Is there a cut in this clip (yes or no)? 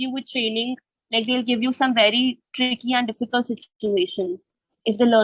no